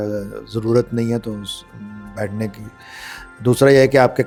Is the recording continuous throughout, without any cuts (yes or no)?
yes